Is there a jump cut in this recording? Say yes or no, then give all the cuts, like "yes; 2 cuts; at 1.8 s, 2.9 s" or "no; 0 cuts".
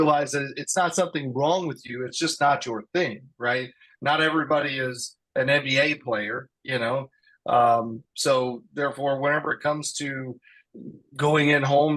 no; 0 cuts